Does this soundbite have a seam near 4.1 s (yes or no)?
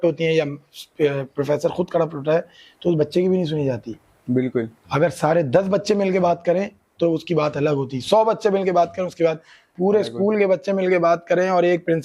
no